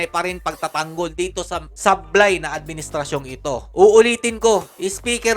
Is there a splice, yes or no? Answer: no